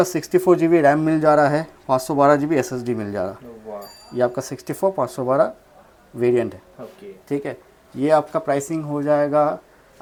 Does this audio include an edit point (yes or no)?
no